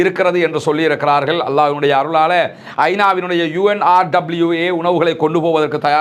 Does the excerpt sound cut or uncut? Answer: uncut